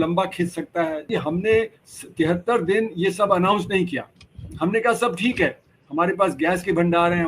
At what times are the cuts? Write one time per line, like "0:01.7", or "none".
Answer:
0:01.0

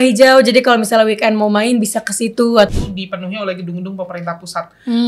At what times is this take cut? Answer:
0:02.7

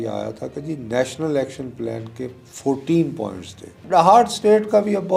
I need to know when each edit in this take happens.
0:03.8

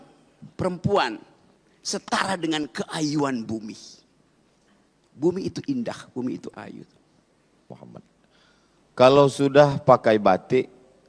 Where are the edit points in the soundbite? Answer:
0:07.7

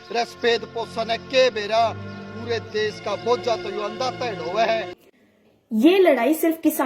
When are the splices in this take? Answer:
0:04.8

